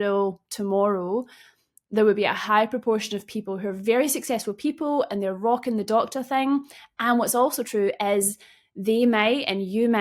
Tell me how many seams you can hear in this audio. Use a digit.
0